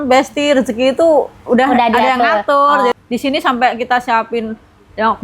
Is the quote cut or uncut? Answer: cut